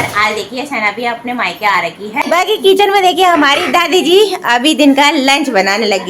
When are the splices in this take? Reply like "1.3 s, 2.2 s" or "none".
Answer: 2.2 s